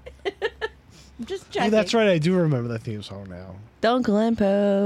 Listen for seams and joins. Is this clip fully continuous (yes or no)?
yes